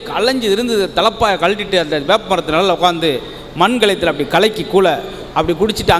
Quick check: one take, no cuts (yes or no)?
yes